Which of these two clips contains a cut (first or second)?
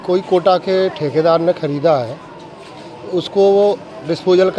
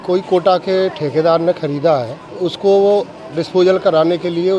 second